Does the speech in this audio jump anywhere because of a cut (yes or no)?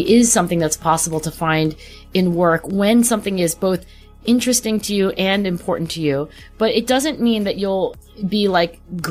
no